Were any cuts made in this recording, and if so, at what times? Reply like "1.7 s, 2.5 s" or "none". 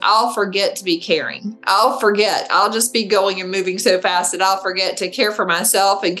none

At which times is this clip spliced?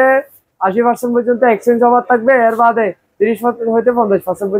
none

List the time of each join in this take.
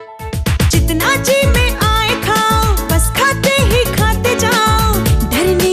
none

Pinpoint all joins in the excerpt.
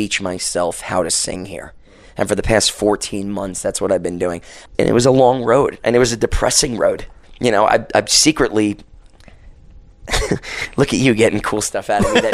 4.7 s, 7.2 s

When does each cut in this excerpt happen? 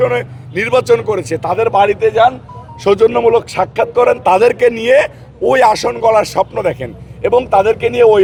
none

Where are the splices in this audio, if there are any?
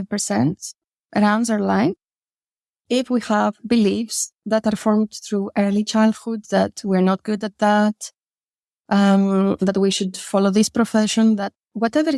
none

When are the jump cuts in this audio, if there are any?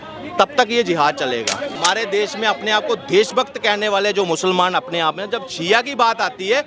1.7 s

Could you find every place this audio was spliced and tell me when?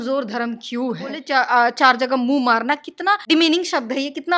1.2 s, 3.2 s

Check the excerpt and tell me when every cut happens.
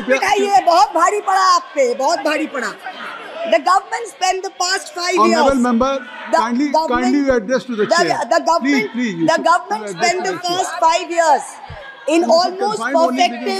none

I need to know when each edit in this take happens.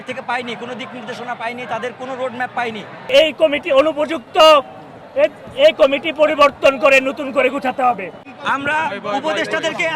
3.1 s, 8.1 s

